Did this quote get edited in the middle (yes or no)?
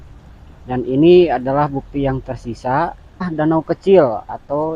yes